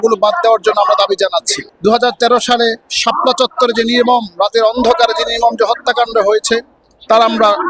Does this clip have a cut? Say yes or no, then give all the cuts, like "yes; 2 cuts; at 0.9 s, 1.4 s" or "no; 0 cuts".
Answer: yes; 1 cut; at 1.5 s